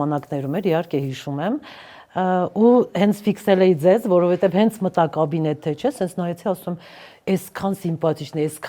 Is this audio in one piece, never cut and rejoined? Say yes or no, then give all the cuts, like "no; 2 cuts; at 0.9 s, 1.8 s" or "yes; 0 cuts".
yes; 0 cuts